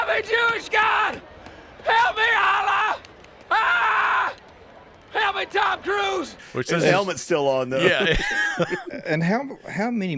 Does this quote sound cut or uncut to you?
uncut